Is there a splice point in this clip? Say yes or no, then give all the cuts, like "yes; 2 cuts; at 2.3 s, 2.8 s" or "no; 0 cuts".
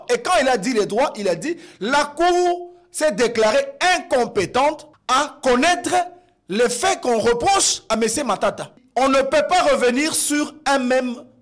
yes; 2 cuts; at 4.9 s, 8.7 s